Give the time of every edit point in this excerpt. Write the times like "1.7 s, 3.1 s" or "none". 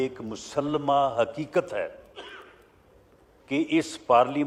none